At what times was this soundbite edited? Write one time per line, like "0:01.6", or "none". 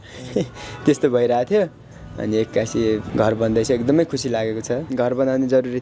0:03.1
0:04.9